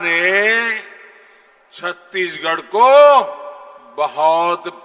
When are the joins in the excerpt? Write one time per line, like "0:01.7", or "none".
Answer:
none